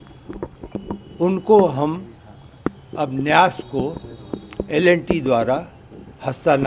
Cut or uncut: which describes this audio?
uncut